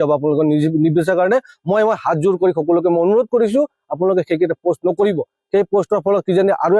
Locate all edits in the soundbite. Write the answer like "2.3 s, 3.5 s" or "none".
none